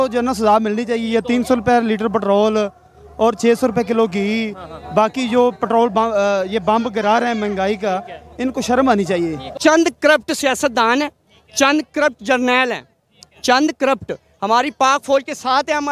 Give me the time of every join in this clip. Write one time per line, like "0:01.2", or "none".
0:09.4